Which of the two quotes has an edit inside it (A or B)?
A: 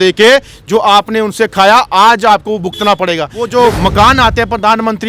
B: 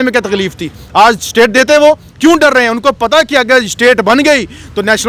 A